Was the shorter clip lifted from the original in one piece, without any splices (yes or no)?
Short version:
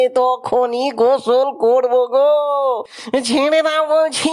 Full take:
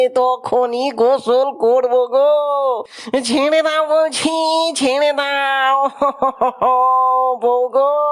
yes